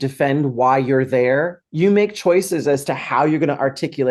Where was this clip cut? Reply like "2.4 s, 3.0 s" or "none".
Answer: 1.6 s